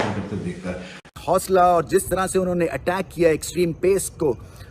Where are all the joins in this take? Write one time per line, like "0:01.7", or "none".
0:01.1